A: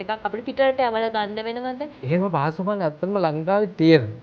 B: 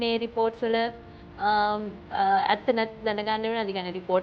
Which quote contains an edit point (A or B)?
A